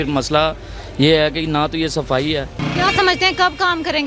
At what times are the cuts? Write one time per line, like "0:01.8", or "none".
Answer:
0:02.6